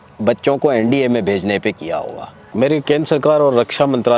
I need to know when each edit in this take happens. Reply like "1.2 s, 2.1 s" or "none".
2.4 s

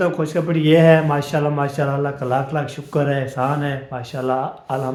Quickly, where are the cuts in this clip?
none

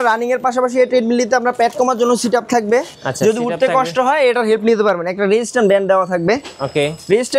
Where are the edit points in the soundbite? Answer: none

